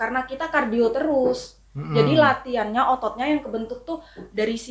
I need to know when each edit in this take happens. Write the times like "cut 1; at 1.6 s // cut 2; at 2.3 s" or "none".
none